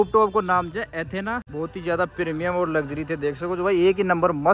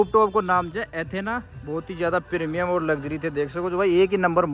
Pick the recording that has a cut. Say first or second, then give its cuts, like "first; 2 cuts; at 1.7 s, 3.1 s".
first; 1 cut; at 1.5 s